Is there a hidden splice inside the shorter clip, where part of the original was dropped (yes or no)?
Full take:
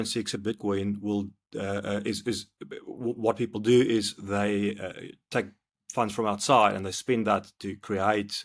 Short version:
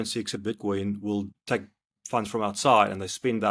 yes